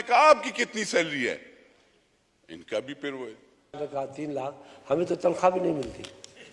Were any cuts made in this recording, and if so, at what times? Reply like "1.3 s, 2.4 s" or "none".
3.8 s